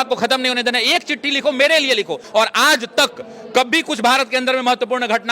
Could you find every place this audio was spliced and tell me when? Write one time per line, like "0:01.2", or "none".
0:02.2